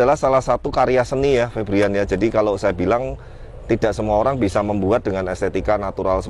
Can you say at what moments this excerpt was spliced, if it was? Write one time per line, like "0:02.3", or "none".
none